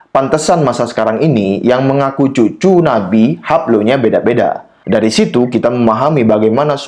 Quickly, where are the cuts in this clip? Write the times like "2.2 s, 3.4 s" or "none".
4.7 s

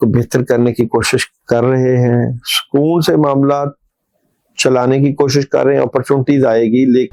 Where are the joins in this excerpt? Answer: none

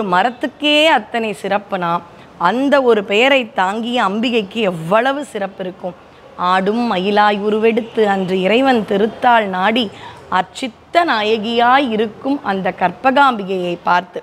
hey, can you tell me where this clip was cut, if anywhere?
none

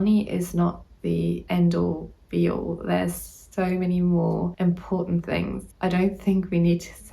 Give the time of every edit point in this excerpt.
1.4 s, 4.5 s, 5.6 s

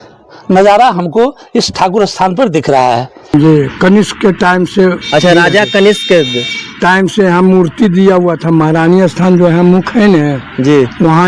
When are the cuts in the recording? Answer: 3.3 s

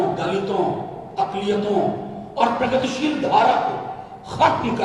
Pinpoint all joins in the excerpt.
none

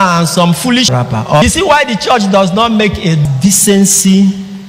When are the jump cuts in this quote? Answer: 1.0 s, 3.3 s

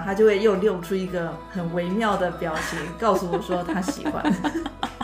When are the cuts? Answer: 1.4 s

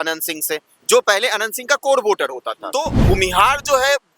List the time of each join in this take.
2.9 s

